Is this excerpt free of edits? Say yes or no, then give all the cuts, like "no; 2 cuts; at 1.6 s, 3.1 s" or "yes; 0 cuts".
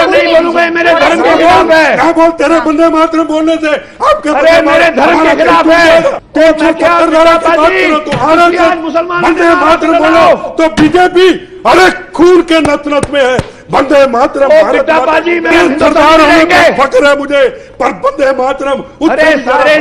no; 2 cuts; at 6.2 s, 15.5 s